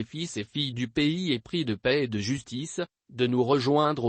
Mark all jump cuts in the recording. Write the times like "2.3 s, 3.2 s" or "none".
2.9 s